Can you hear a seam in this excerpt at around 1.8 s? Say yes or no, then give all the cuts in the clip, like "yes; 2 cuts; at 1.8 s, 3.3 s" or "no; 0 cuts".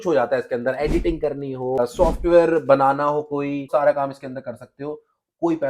yes; 2 cuts; at 1.8 s, 3.7 s